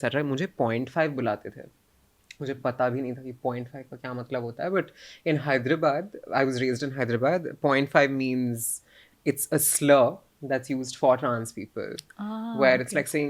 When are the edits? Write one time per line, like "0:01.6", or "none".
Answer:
none